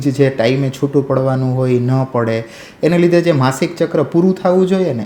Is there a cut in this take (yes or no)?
no